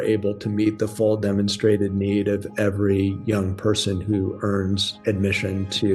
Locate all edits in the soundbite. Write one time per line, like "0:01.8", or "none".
0:04.9